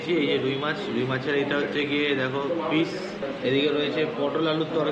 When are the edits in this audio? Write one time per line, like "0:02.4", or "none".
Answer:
none

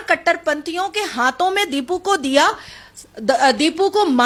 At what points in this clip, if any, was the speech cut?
none

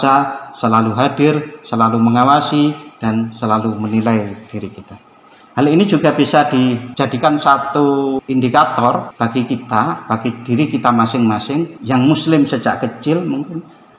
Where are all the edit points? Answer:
0:06.9
0:08.2
0:09.1
0:11.8

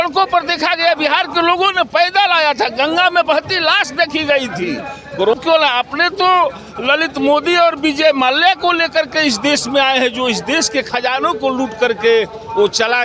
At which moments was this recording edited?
0:05.3

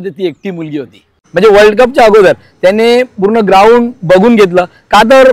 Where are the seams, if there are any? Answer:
0:01.2

